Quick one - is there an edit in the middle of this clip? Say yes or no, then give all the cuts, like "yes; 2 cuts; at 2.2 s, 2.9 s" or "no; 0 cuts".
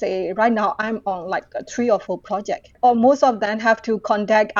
yes; 1 cut; at 2.7 s